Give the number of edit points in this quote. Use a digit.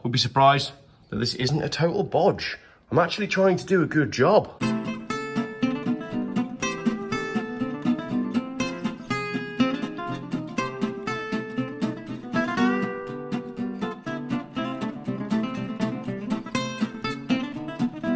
0